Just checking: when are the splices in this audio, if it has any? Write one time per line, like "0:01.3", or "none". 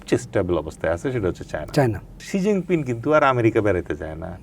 0:02.3